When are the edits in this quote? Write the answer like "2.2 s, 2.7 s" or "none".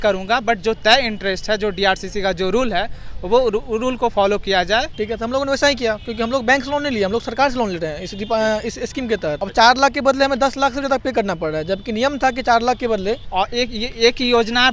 4.9 s, 9.4 s, 13.2 s